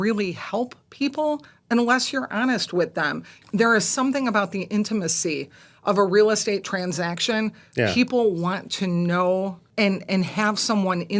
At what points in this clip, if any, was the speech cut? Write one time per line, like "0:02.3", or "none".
0:03.3
0:09.6